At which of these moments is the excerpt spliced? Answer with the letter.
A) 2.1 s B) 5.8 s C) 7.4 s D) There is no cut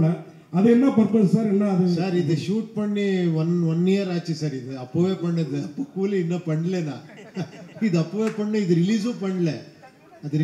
D